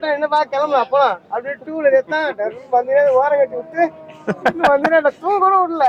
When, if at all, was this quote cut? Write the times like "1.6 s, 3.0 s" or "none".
none

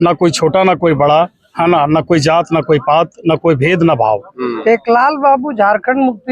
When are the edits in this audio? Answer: 4.6 s

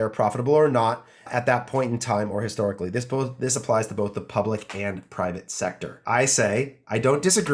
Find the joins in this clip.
1.3 s, 5.9 s

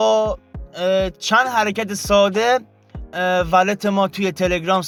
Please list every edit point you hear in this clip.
none

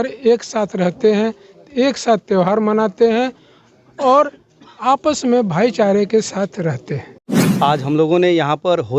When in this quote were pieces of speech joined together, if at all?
7.4 s

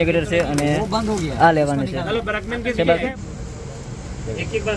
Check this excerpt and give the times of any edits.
3.2 s

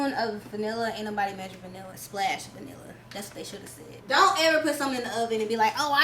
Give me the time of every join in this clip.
1.9 s, 4.0 s

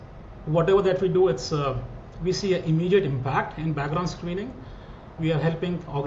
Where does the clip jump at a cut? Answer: 5.1 s

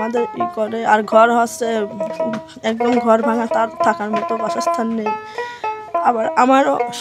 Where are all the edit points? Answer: none

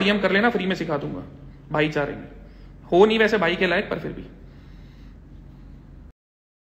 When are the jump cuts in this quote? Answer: none

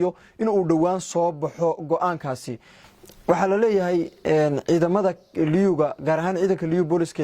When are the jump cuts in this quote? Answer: 2.6 s

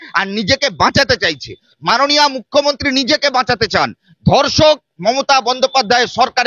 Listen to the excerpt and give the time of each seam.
none

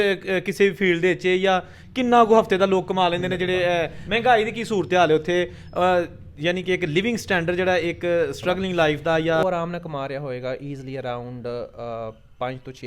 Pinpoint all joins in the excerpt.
4.0 s, 9.4 s

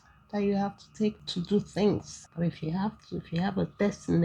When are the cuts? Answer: 2.2 s

